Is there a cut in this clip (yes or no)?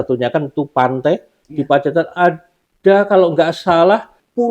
no